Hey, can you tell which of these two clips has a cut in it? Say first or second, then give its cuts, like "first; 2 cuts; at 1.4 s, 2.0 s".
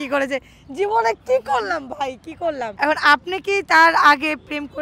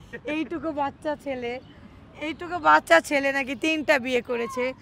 first; 1 cut; at 2.7 s